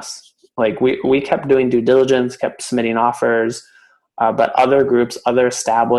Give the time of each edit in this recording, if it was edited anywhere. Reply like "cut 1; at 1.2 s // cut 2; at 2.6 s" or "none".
none